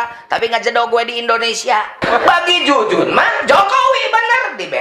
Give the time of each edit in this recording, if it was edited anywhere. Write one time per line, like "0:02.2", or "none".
0:02.0